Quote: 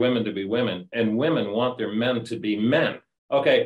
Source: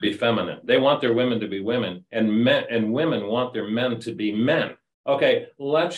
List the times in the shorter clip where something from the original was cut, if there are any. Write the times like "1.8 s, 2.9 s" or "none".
0.9 s

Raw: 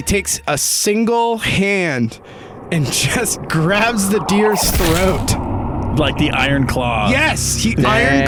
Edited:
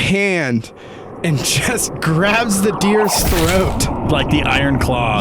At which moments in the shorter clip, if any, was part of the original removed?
4.0 s

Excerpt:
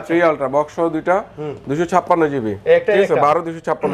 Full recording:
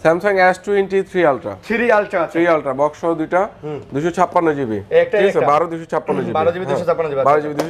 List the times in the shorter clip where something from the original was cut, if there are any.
none

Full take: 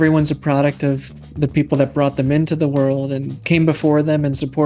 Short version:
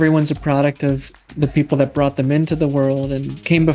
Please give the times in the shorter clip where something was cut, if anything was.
none

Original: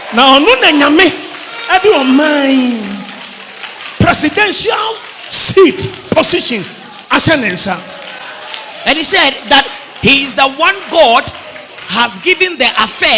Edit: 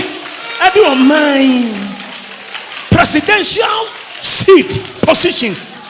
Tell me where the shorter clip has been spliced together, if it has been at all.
none

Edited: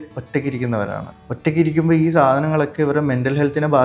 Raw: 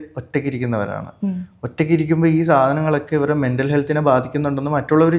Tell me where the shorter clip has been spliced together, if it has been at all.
1.1 s

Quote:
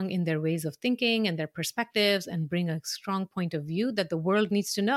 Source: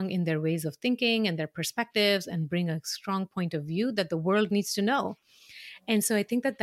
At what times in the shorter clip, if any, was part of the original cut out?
none

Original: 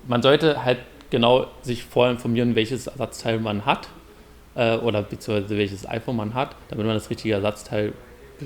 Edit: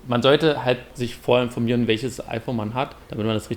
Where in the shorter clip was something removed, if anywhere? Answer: 0.9 s, 2.2 s

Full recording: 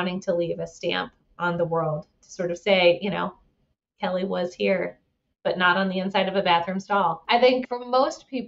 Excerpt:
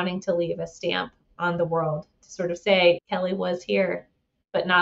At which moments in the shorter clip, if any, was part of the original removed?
3.0 s

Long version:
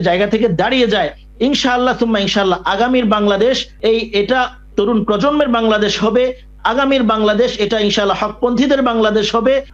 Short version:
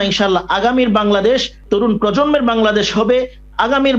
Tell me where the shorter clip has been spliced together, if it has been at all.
1.5 s

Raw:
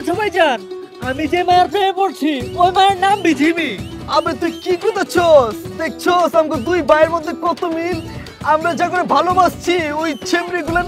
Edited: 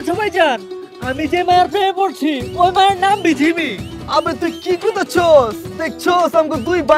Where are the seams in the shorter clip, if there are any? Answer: none

